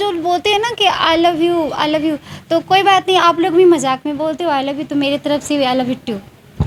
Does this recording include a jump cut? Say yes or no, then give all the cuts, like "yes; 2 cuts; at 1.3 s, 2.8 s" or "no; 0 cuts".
no; 0 cuts